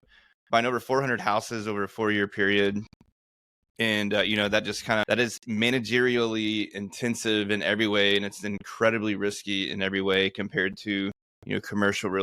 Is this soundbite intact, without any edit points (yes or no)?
no